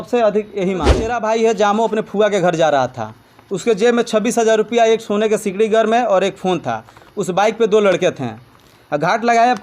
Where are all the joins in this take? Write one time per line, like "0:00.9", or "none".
0:01.1